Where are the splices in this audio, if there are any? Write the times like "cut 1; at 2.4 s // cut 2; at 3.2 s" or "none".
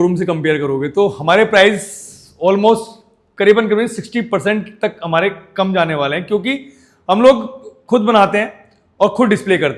none